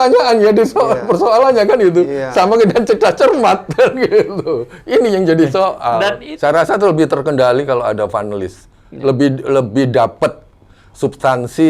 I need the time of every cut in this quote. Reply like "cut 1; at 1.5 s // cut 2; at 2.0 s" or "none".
cut 1; at 6.2 s